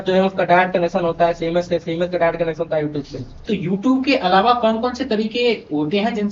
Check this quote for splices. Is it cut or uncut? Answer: cut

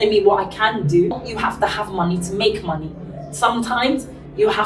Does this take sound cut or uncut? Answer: cut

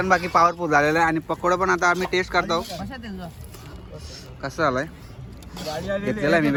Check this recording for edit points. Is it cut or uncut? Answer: uncut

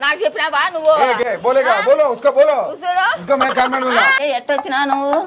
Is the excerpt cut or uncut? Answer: cut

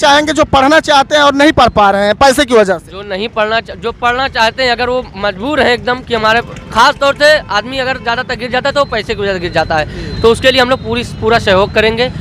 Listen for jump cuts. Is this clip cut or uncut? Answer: uncut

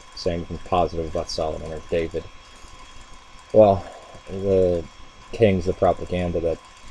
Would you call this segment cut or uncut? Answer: uncut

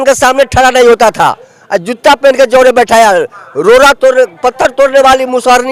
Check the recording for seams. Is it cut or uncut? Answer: uncut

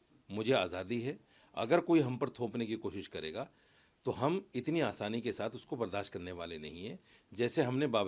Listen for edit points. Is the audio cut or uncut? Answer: uncut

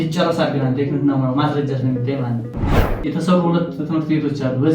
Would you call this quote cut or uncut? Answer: cut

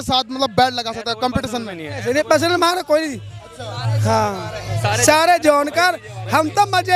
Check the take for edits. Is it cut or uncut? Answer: uncut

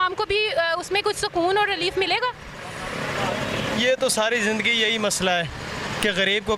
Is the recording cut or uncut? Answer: uncut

